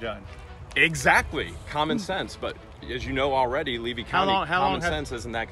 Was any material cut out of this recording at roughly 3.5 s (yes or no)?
no